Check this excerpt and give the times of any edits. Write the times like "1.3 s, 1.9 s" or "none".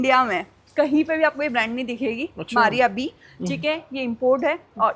none